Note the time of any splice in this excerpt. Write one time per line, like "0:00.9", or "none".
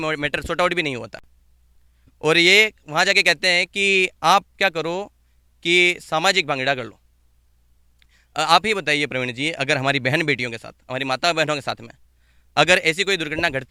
none